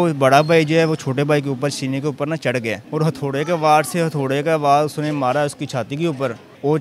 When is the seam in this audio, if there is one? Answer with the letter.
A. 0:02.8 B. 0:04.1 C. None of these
A